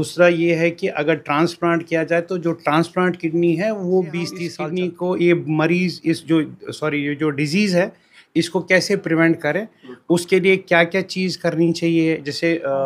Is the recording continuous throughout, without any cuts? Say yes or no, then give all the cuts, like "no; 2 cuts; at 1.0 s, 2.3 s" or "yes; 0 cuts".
no; 1 cut; at 4.5 s